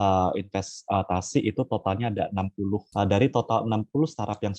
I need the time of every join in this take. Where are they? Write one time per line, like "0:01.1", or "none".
0:02.9